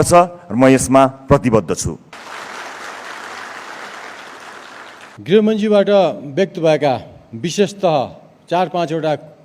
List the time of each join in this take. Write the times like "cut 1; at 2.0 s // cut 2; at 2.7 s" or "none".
cut 1; at 2.1 s // cut 2; at 5.1 s

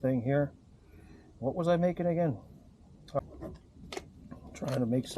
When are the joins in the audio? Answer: cut 1; at 3.2 s

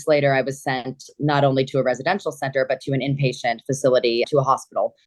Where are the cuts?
none

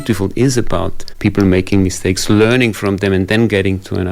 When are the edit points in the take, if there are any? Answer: cut 1; at 1.0 s

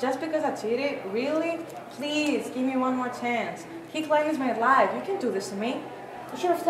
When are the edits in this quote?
none

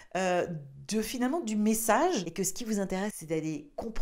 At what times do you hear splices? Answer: cut 1; at 2.3 s

